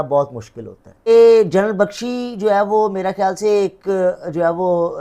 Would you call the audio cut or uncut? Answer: cut